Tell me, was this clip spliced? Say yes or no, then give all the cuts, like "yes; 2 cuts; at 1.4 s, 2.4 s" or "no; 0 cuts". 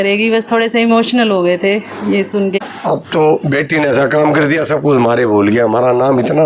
yes; 1 cut; at 2.6 s